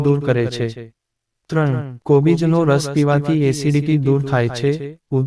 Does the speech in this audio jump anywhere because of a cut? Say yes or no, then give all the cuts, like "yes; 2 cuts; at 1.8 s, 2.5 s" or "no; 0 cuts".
yes; 1 cut; at 1.5 s